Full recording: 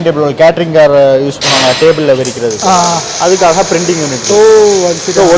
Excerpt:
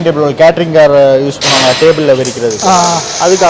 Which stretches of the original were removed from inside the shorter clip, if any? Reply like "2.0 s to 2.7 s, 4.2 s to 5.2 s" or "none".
none

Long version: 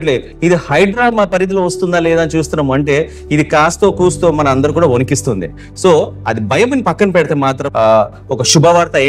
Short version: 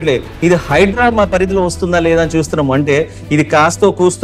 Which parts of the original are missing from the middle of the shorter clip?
none

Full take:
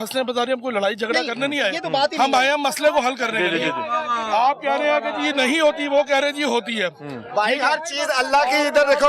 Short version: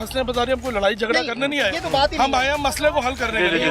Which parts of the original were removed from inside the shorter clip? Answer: none

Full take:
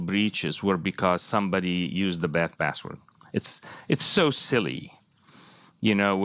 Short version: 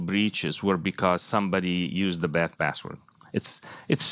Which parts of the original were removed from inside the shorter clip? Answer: none

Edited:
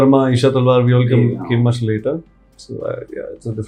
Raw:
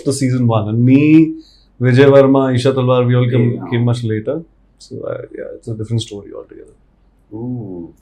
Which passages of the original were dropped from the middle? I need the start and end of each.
none

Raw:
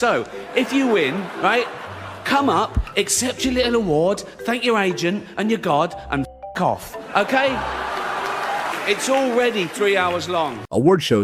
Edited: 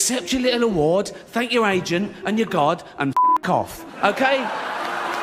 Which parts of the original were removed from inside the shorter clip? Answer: none

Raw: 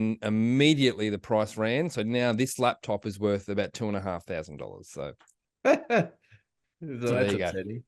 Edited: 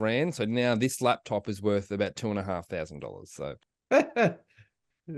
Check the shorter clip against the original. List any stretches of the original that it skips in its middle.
5.3 s to 5.4 s

